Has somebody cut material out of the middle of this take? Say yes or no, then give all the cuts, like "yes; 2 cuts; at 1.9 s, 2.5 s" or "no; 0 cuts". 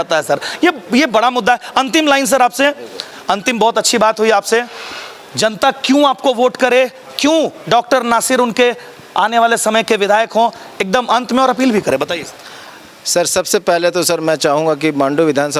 no; 0 cuts